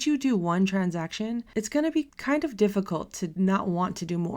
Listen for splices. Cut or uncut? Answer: cut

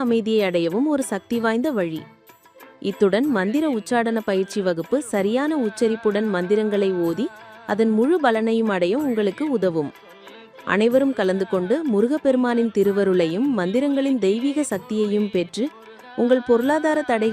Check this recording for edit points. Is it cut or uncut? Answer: uncut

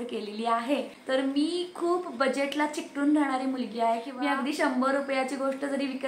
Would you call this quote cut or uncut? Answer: cut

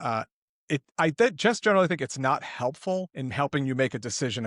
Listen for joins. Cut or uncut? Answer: cut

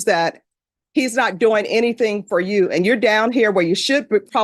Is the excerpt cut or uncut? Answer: uncut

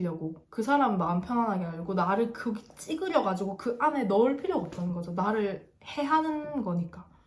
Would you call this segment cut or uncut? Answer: uncut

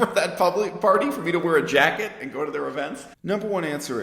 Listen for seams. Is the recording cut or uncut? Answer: cut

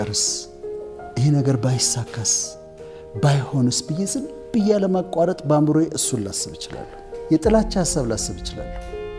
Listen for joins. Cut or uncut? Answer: cut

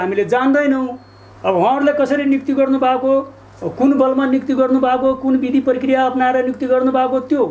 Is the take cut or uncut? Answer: uncut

